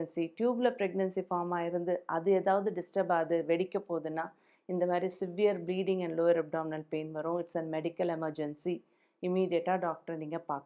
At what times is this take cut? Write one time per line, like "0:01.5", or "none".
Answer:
none